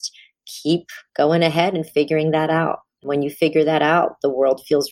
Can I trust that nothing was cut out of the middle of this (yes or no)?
yes